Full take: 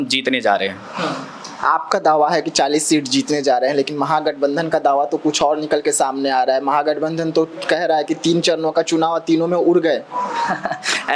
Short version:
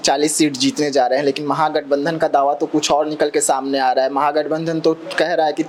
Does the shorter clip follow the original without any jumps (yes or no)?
yes